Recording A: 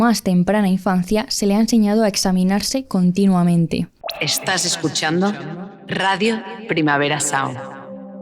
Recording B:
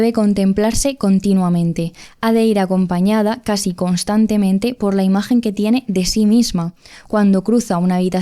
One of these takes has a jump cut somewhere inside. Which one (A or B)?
A